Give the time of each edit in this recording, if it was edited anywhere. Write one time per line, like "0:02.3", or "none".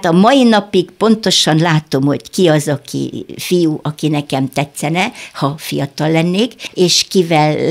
0:06.6